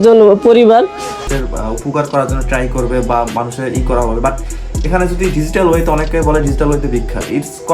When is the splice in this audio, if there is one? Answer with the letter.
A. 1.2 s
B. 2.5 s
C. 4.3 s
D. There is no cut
A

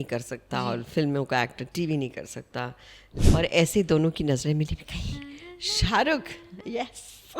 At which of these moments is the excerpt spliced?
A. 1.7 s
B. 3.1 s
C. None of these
B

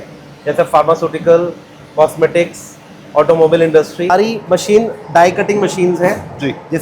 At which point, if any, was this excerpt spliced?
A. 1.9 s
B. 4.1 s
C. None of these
B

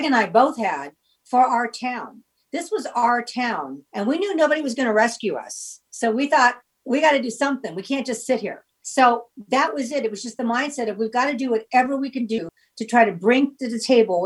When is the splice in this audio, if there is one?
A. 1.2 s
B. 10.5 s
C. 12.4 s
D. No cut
C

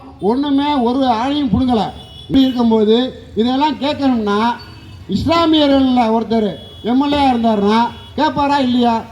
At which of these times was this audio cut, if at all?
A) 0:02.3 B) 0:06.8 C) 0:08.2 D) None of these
A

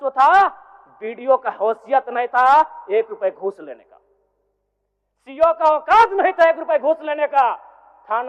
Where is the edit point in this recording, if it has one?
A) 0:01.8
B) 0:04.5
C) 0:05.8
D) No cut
D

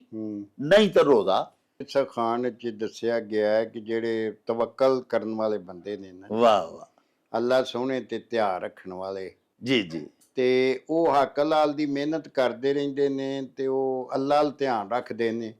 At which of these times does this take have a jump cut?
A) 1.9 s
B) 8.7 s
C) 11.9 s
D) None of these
A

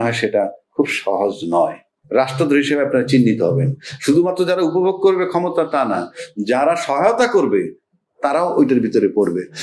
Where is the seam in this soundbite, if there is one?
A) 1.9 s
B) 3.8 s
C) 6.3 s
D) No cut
A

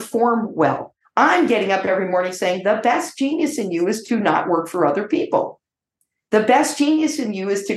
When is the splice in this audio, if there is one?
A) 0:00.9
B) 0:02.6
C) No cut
A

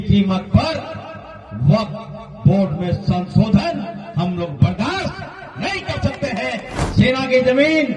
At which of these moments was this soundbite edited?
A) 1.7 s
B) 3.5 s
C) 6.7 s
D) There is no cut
C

